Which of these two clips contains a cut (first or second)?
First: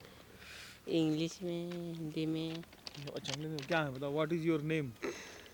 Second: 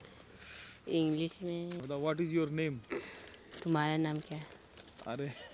second